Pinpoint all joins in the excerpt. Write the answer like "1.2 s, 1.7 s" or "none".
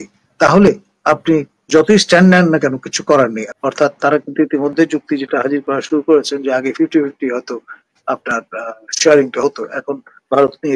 3.4 s

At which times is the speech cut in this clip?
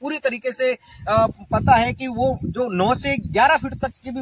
none

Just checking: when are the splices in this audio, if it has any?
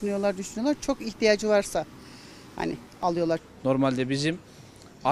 3.0 s

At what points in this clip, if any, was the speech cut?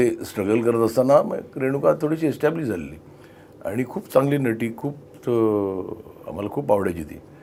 none

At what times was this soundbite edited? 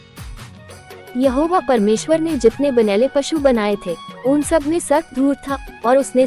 1.1 s

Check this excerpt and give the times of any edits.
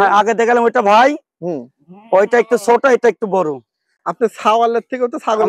none

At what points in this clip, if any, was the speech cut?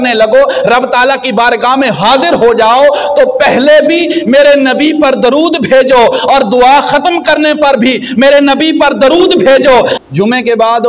10.0 s

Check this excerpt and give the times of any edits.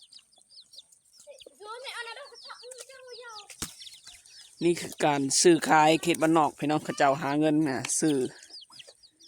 3.5 s

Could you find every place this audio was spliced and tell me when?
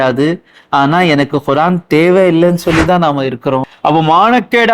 3.7 s

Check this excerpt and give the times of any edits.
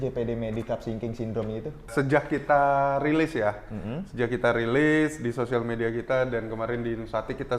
1.9 s

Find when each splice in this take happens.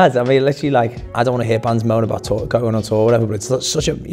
1.0 s

